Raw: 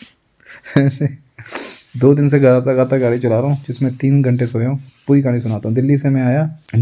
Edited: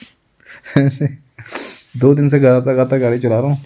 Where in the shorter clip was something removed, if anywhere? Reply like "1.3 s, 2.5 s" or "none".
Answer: none